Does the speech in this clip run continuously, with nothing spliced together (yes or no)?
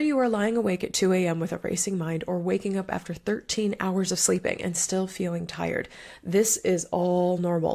yes